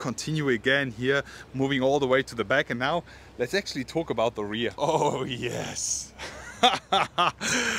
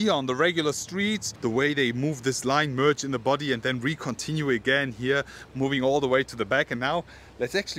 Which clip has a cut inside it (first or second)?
second